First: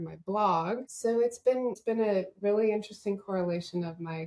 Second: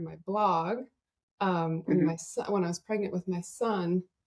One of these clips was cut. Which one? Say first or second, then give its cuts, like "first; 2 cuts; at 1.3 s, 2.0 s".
first; 2 cuts; at 0.9 s, 1.8 s